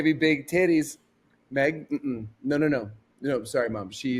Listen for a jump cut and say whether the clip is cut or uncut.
uncut